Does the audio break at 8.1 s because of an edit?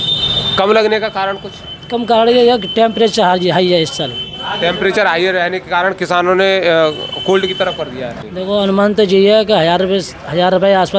yes; 1 cut; at 8.1 s

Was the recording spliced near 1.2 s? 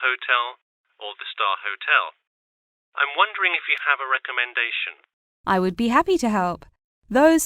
yes; 1 cut; at 1.2 s

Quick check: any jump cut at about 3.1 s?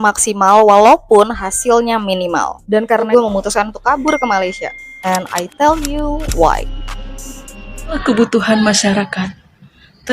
yes; 2 cuts; at 3.1 s, 8.0 s

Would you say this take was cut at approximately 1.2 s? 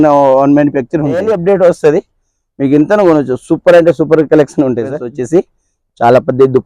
yes; 2 cuts; at 1.2 s, 5.0 s

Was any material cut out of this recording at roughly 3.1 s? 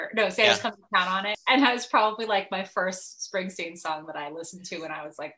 no; 1 cut; at 1.3 s

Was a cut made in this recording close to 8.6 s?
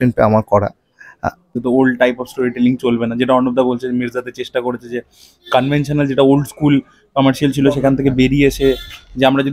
no; 1 cut; at 1.6 s

